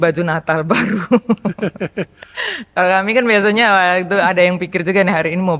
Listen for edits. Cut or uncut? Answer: uncut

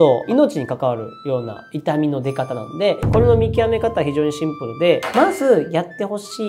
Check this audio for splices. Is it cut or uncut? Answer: cut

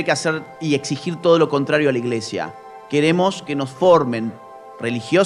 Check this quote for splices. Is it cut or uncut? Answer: uncut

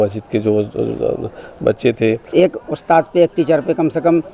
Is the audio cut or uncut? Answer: cut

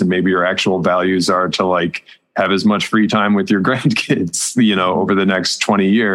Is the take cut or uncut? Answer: uncut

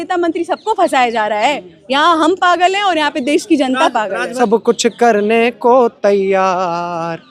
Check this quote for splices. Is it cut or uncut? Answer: cut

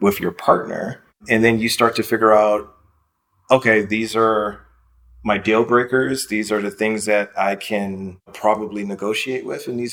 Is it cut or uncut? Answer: cut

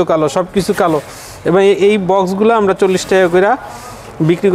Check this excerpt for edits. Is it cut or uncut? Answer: uncut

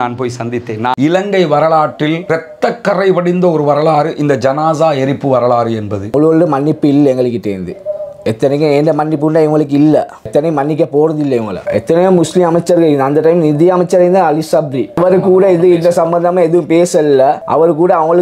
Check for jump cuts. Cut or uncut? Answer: cut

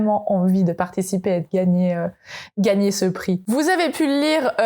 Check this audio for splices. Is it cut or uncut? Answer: uncut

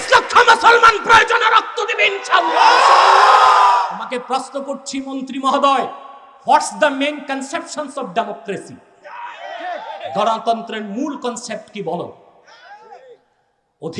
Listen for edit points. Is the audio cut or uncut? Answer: cut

